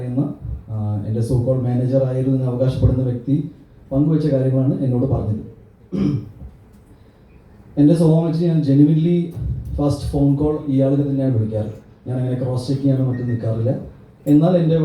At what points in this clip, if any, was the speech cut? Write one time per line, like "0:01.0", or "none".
none